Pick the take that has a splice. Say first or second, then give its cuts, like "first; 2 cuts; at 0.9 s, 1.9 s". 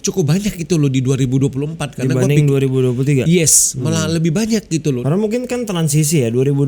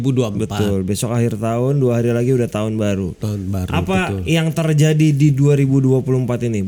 first; 1 cut; at 5.0 s